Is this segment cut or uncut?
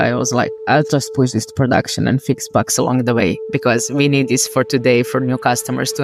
uncut